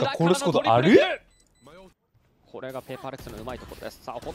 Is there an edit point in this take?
yes; 1 cut; at 1.8 s

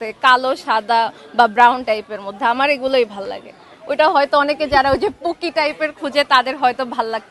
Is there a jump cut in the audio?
no; 0 cuts

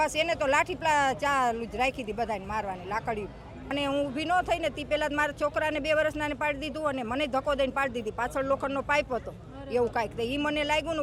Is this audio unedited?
no; 1 cut; at 3.7 s

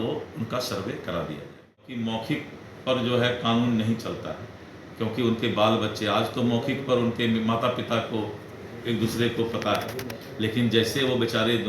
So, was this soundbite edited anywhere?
yes; 1 cut; at 1.9 s

